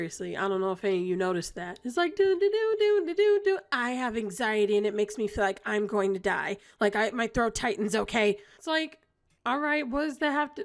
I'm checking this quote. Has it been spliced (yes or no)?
no